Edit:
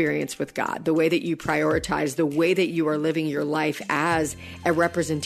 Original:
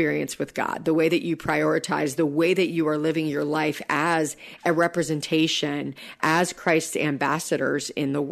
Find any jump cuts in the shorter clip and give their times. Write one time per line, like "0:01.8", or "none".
none